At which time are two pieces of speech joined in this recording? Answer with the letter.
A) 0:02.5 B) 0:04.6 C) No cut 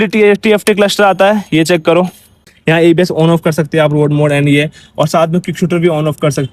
A